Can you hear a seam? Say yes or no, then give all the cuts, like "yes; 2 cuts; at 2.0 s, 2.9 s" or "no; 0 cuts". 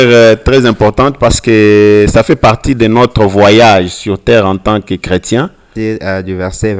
yes; 1 cut; at 5.6 s